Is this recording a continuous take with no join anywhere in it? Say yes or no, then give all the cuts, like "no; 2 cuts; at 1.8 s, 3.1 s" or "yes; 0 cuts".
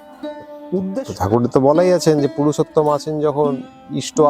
no; 1 cut; at 1.1 s